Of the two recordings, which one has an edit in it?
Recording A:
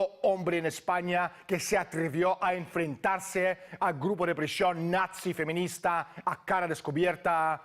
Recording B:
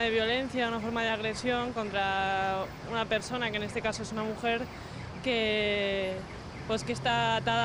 A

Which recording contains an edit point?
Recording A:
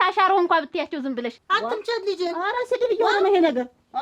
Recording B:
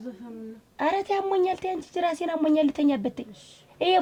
A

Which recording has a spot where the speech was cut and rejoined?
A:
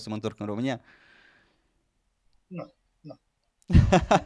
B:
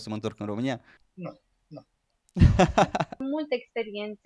B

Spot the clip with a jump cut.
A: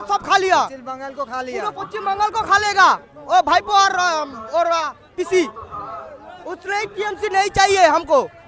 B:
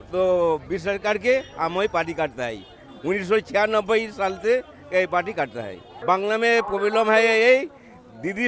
B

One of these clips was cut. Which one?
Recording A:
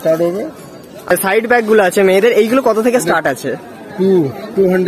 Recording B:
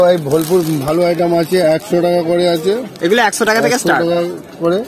A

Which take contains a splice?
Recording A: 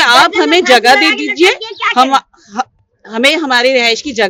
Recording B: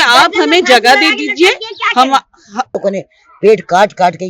B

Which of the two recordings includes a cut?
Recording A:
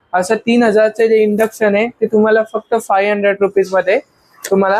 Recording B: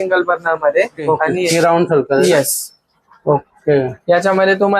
B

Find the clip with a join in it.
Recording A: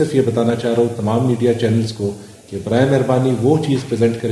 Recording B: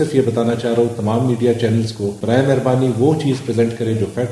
B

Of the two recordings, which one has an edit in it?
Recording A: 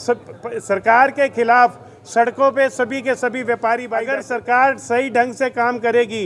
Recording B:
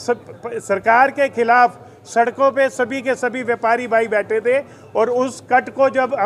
A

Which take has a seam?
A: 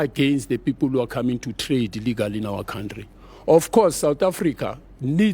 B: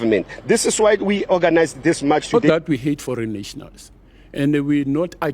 B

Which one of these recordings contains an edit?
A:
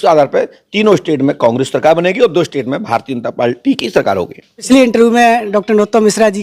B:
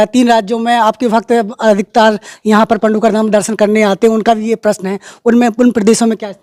A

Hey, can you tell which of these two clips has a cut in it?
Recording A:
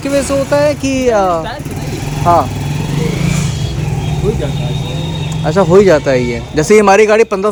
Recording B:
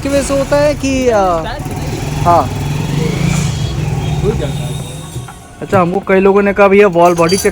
B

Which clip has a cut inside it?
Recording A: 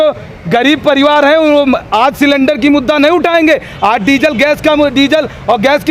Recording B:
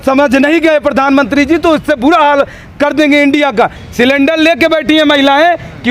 B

